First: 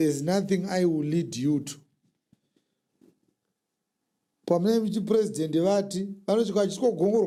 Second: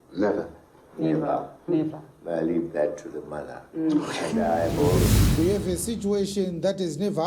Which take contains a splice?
second; 1 cut; at 5.0 s

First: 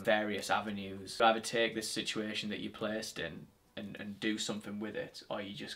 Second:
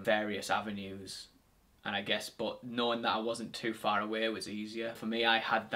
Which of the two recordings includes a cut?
first; 1 cut; at 1.1 s

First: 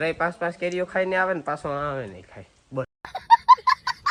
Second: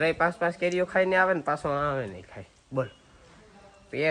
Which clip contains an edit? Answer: second; 1 cut; at 3.0 s

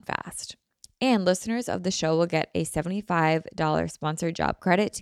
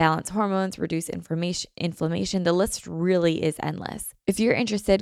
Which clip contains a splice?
second; 1 cut; at 4.1 s

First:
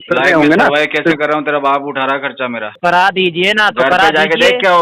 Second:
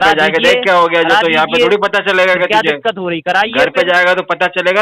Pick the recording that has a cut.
first; 1 cut; at 2.7 s

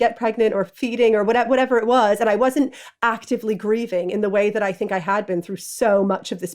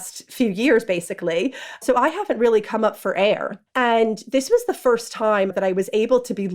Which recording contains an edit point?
second; 3 cuts; at 1.8 s, 3.6 s, 5.5 s

